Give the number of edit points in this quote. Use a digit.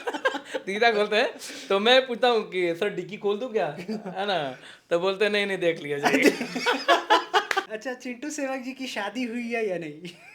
1